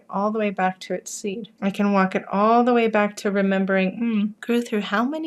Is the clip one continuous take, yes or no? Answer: no